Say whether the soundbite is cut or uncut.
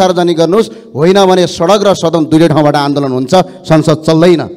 uncut